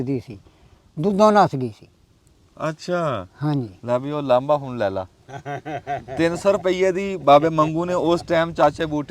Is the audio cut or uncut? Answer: uncut